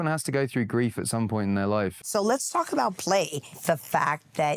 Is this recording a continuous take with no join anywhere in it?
no; 2 cuts; at 2.0 s, 3.5 s

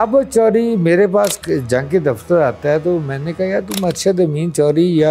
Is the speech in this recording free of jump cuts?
yes; 0 cuts

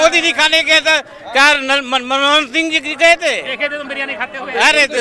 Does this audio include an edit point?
no; 0 cuts

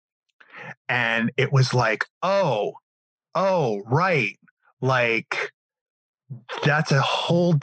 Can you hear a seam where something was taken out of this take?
no; 0 cuts

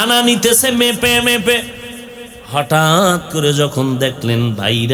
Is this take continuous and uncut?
yes; 0 cuts

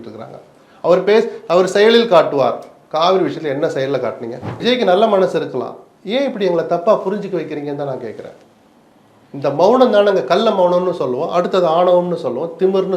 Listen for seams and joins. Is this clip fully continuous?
no; 1 cut; at 4.5 s

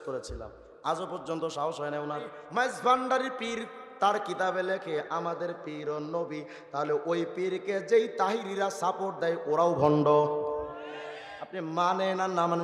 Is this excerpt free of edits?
no; 1 cut; at 2.4 s

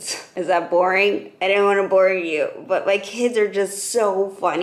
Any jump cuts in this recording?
no; 0 cuts

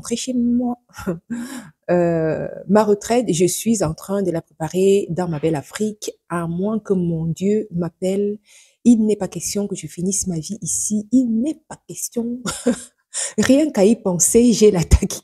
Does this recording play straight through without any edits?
yes; 0 cuts

